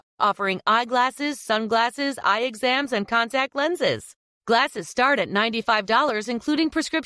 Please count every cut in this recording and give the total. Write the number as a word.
zero